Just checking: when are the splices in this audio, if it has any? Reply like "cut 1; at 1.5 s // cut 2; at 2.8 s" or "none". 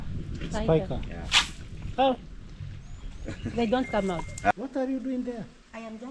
cut 1; at 4.5 s